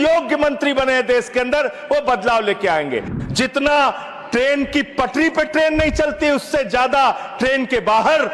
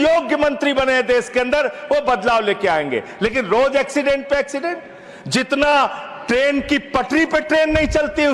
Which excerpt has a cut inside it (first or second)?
first